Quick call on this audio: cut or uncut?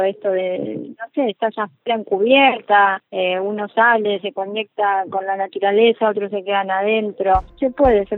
uncut